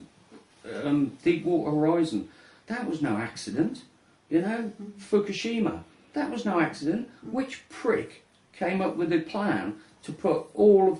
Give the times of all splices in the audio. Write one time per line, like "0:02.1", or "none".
0:02.9